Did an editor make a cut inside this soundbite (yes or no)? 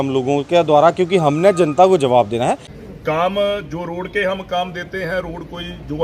yes